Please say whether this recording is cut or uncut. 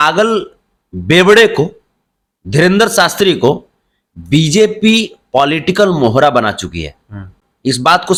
uncut